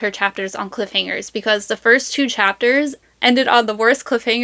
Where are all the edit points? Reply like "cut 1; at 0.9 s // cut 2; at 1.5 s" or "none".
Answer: cut 1; at 3.0 s